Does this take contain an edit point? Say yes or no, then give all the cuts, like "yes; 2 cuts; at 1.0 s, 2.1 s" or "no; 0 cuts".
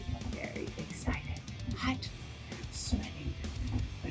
yes; 1 cut; at 1.6 s